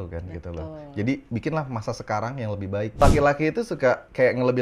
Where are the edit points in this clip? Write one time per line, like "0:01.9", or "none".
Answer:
0:02.9